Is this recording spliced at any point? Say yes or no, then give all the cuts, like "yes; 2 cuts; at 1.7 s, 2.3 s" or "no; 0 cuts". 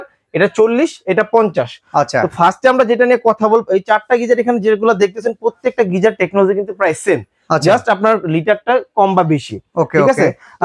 no; 0 cuts